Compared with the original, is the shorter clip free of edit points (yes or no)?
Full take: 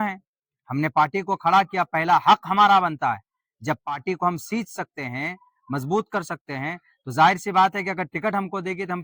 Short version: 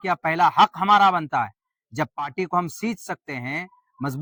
yes